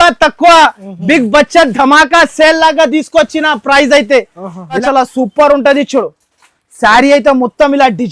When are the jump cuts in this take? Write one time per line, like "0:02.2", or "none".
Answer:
0:04.8